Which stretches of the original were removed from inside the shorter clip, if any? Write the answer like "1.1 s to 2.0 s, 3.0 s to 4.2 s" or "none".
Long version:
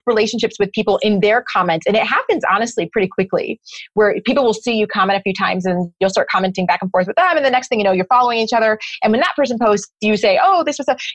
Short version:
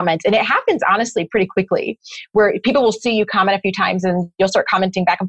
none